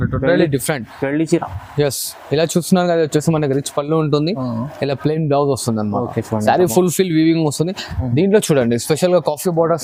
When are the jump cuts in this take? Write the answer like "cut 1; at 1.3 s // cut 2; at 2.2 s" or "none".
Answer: none